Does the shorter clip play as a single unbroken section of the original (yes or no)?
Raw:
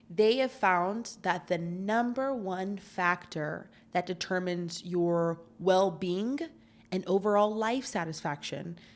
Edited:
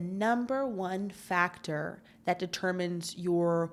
yes